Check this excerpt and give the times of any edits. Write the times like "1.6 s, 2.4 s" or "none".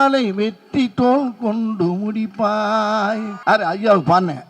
3.3 s